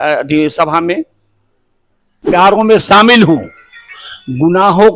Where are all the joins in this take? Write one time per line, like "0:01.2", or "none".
0:02.3